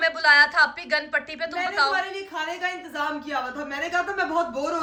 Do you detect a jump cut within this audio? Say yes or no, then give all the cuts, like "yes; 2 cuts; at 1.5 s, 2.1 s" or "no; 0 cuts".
no; 0 cuts